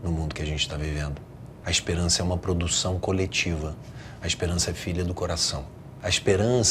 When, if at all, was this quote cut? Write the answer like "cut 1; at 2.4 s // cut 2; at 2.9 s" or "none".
cut 1; at 1.5 s // cut 2; at 5.8 s

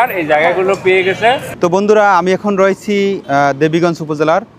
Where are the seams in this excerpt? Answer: cut 1; at 1.5 s // cut 2; at 3.2 s

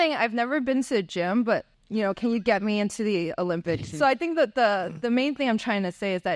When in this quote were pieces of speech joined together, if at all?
cut 1; at 1.8 s // cut 2; at 3.9 s

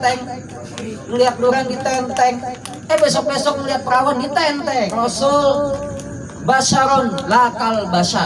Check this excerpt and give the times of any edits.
cut 1; at 5.0 s

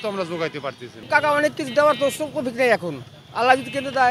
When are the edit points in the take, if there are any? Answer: cut 1; at 0.9 s

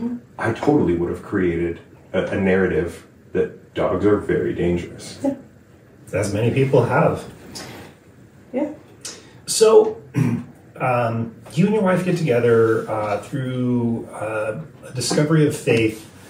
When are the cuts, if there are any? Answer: none

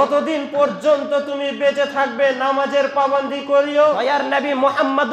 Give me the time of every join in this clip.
cut 1; at 4.1 s

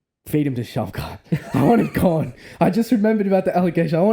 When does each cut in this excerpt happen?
none

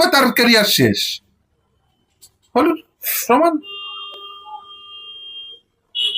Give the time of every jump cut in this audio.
none

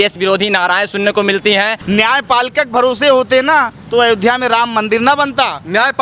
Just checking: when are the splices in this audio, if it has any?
cut 1; at 1.8 s

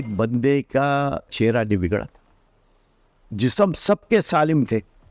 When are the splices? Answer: cut 1; at 1.3 s

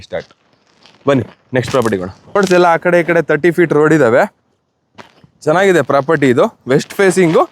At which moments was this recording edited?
cut 1; at 2.4 s

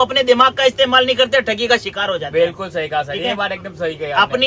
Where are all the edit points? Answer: none

